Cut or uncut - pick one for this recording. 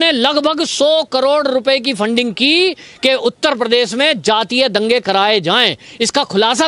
uncut